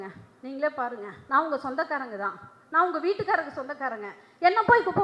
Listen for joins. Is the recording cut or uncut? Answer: cut